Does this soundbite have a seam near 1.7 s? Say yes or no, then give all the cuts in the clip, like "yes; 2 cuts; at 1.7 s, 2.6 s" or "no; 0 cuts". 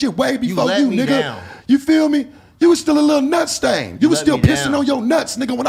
no; 0 cuts